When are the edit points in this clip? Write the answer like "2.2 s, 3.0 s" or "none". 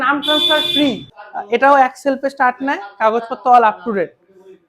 1.1 s